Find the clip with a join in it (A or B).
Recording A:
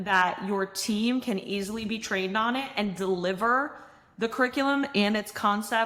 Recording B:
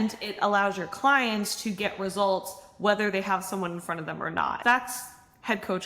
B